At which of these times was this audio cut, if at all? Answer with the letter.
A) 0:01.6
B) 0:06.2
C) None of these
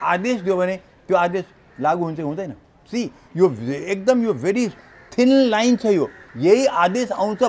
B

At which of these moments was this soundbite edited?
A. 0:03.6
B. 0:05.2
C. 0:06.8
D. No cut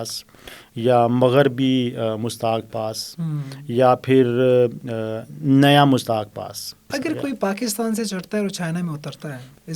C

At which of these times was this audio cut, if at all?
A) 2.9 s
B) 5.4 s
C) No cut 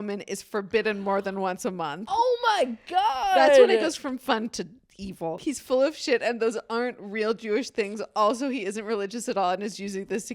B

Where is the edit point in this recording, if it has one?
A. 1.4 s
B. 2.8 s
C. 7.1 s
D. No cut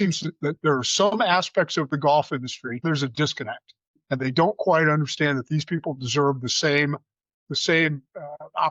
B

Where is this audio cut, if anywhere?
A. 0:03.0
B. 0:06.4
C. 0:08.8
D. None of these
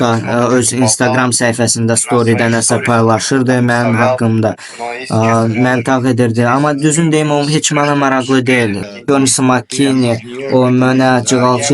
C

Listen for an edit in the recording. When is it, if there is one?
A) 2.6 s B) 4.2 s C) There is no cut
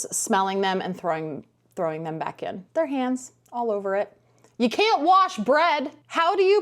A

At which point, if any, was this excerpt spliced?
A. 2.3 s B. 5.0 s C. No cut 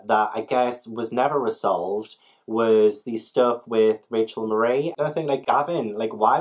B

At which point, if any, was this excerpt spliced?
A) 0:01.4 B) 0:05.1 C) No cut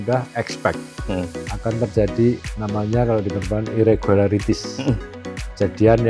C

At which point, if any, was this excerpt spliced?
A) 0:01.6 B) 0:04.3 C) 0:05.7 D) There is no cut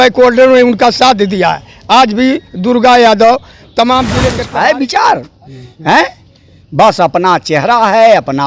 B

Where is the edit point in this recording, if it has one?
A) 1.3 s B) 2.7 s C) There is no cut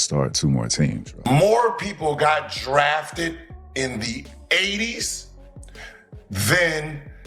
A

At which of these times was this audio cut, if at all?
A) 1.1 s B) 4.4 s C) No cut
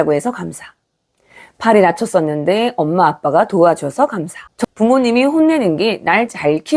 B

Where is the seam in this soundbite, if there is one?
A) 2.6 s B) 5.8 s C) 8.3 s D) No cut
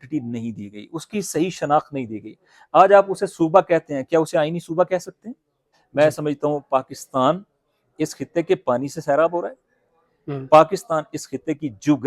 B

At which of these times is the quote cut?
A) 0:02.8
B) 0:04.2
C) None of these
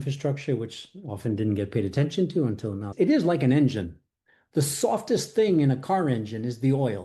A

